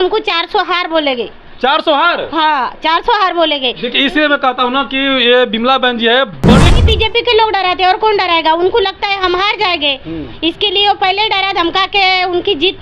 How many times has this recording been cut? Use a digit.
1